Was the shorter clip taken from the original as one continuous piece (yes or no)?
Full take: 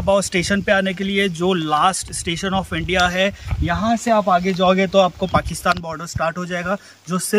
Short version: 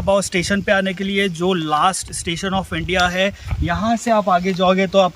yes